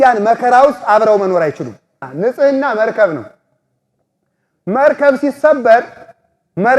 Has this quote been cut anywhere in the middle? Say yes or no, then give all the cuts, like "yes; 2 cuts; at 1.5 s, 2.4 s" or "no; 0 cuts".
yes; 1 cut; at 2.0 s